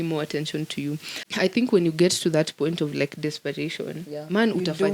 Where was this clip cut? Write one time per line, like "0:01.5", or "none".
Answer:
0:01.2